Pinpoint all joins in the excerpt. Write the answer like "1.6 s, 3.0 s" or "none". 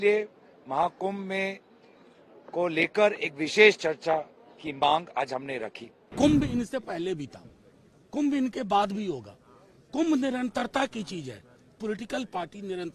6.1 s